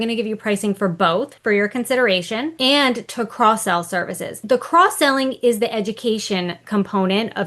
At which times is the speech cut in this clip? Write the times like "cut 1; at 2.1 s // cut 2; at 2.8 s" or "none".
cut 1; at 1.3 s // cut 2; at 2.5 s // cut 3; at 4.4 s